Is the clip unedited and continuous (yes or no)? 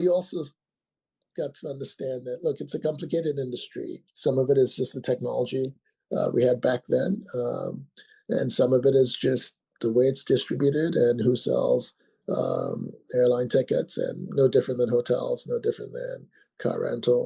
no